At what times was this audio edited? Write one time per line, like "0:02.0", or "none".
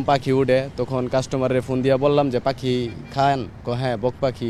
none

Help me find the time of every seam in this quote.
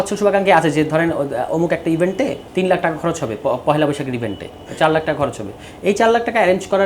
0:02.4

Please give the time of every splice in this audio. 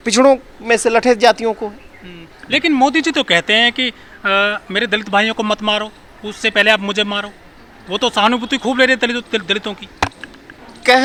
none

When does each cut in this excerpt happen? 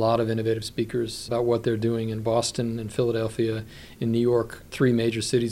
0:01.2
0:04.6

